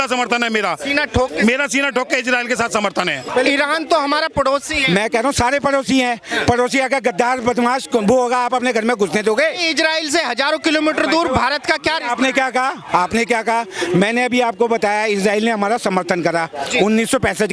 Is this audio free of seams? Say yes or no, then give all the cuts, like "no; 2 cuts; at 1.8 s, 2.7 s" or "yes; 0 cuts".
no; 1 cut; at 3.3 s